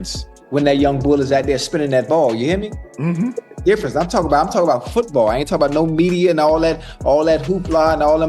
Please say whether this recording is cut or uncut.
uncut